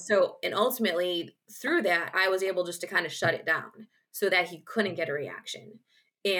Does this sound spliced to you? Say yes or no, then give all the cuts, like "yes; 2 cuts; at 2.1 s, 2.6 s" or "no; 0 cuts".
no; 0 cuts